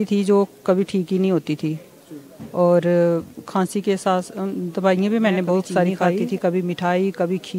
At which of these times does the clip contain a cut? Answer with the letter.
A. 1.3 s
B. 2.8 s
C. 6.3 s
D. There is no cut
C